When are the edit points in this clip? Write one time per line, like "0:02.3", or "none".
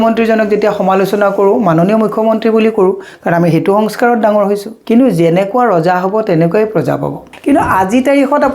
0:04.7
0:07.2